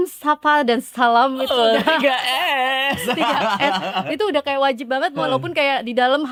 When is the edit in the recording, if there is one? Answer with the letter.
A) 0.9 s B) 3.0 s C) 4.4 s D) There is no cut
D